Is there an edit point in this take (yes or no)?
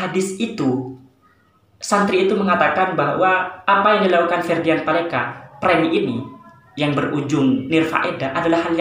no